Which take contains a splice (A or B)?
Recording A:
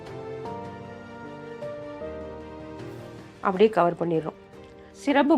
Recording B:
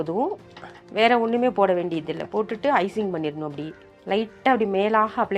A